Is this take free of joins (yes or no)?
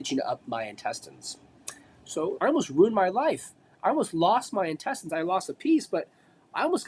no